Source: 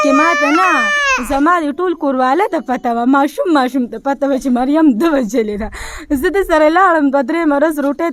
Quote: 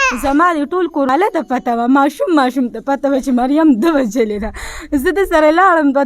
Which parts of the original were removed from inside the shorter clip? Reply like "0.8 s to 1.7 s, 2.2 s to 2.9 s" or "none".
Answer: 2.2 s to 2.3 s